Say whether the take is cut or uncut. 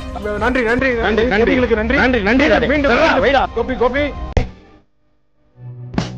uncut